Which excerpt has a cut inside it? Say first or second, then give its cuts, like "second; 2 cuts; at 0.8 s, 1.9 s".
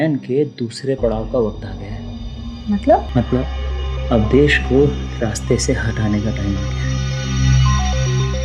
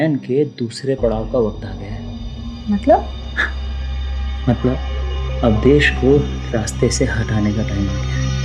first; 1 cut; at 3.1 s